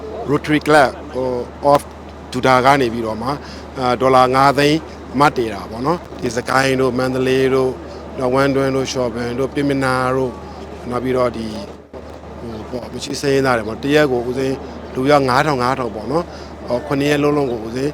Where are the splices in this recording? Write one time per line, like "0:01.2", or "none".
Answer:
0:06.0